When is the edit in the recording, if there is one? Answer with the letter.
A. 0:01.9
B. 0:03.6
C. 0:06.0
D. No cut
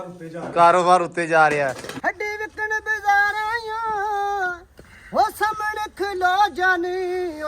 A